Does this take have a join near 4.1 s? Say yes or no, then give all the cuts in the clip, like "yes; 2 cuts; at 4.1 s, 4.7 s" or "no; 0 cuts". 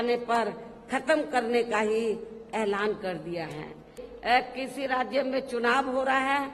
yes; 1 cut; at 4.1 s